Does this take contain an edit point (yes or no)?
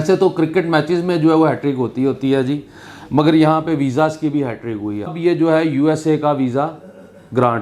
yes